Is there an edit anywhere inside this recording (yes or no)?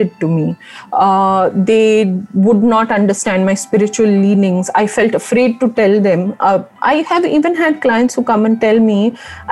no